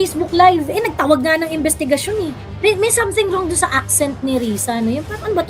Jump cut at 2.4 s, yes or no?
yes